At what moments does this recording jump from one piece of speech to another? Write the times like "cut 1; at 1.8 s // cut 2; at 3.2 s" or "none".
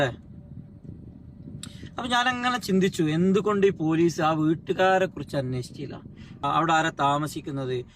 cut 1; at 6.4 s